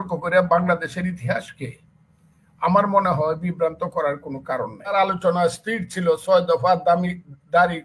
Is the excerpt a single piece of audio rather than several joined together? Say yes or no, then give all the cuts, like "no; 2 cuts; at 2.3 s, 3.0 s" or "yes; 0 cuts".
no; 1 cut; at 4.9 s